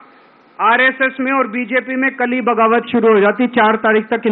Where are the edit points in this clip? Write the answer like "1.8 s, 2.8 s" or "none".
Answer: none